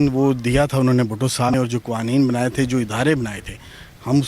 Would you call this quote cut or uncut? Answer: cut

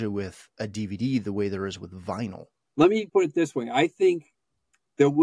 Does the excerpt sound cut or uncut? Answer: uncut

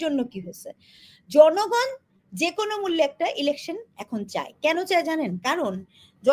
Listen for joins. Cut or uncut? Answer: uncut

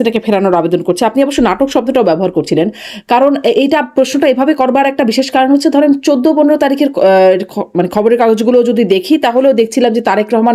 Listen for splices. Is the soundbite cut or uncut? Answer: uncut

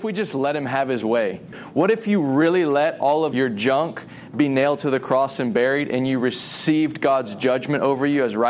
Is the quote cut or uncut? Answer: cut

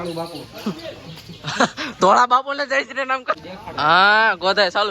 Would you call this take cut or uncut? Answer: cut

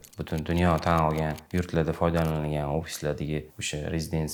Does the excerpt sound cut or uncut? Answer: uncut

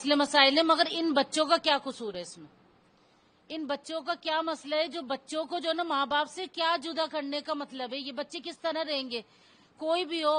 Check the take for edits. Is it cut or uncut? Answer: uncut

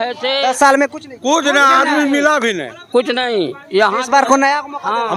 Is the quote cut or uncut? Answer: uncut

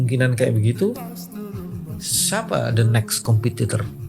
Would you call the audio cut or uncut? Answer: uncut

